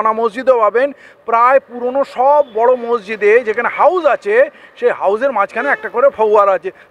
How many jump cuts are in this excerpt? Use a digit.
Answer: 0